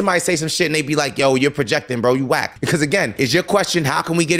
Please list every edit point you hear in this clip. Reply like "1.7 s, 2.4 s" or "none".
2.5 s